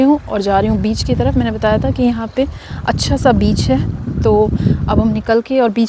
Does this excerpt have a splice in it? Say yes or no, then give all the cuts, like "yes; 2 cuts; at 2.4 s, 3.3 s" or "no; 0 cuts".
no; 0 cuts